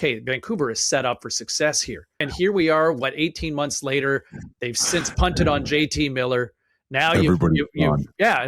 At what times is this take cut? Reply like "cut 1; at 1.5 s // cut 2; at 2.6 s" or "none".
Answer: cut 1; at 2.2 s